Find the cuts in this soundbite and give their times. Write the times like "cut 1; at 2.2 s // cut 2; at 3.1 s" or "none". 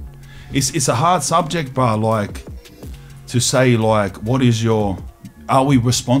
none